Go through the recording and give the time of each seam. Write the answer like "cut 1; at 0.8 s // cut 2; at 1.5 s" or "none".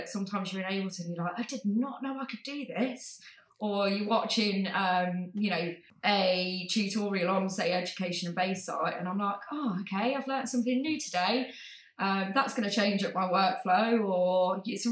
cut 1; at 5.8 s

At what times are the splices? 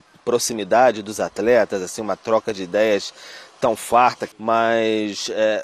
cut 1; at 4.2 s

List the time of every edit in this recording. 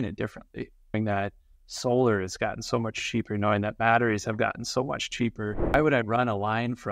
cut 1; at 0.9 s // cut 2; at 5.7 s

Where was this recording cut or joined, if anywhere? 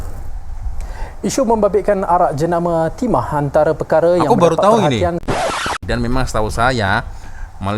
cut 1; at 5.3 s

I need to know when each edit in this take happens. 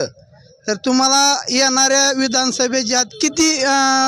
none

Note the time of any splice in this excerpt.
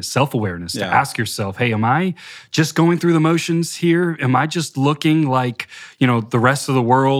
none

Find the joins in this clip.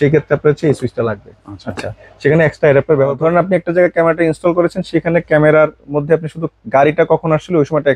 cut 1; at 3.1 s

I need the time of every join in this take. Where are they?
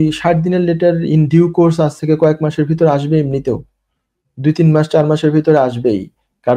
none

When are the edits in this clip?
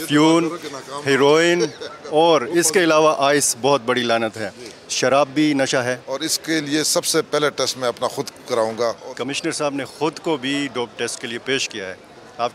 cut 1; at 6.1 s // cut 2; at 9.0 s

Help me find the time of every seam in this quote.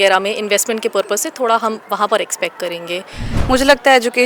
cut 1; at 3.3 s

